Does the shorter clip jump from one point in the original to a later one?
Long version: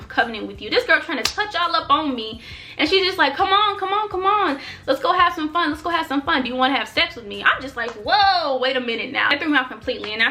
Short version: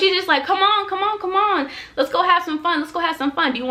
no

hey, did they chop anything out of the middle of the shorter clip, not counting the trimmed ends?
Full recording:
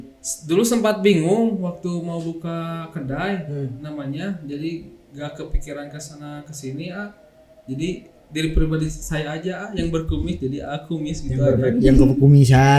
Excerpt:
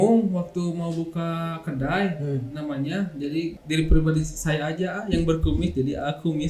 yes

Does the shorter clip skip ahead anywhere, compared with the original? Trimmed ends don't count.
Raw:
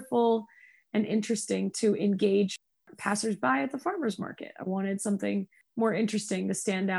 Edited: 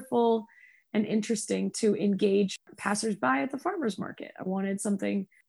yes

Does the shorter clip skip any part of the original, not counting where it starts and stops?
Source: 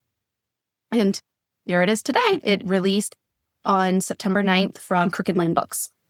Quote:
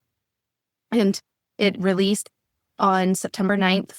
yes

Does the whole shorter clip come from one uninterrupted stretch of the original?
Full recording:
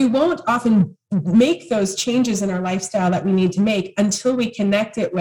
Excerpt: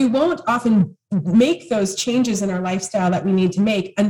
yes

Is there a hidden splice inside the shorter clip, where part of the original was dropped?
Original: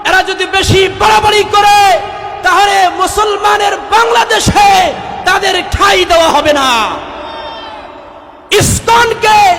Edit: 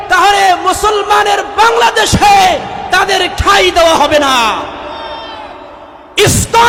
no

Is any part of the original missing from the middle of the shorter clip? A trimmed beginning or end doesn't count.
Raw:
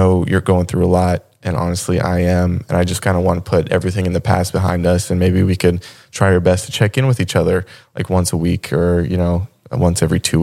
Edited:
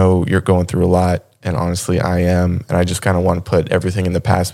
no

